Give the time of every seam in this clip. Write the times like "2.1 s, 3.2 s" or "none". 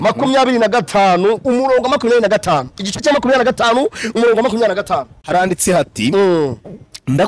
5.1 s